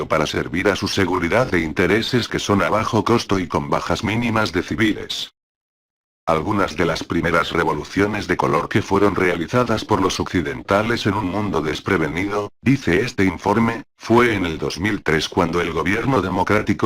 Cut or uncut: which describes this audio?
cut